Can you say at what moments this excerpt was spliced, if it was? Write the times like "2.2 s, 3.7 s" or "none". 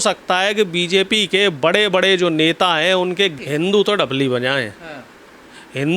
3.4 s